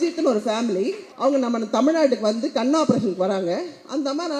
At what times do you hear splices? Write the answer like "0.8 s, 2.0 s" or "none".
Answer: 1.0 s